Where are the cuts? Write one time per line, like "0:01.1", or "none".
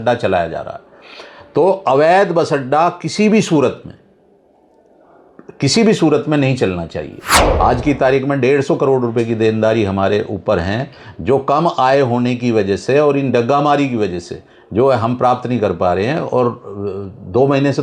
0:07.4